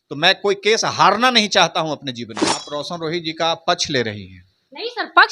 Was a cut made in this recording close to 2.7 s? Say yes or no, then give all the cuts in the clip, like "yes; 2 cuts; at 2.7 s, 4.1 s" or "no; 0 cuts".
yes; 1 cut; at 2.7 s